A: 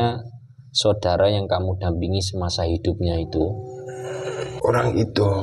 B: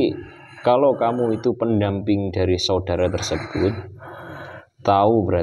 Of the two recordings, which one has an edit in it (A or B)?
A